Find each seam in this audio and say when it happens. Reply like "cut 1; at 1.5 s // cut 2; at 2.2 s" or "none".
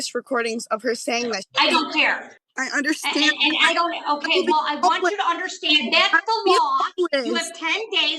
cut 1; at 2.3 s